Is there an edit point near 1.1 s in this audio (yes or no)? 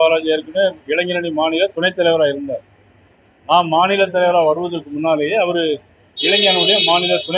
no